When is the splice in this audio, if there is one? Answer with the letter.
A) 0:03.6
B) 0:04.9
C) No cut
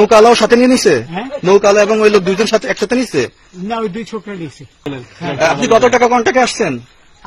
B